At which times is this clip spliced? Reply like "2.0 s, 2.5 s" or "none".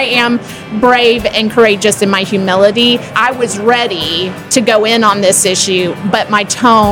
3.1 s, 4.4 s